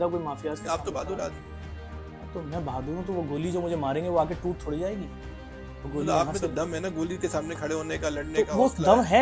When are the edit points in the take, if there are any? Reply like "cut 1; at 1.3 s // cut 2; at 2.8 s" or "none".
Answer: none